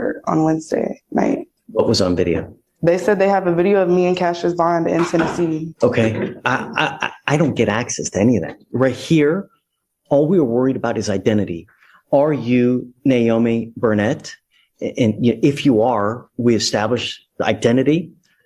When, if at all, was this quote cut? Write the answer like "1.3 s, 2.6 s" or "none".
1.6 s, 5.7 s